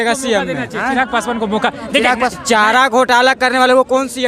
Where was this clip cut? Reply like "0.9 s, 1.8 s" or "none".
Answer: none